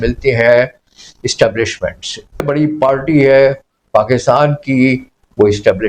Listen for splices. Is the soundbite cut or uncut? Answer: cut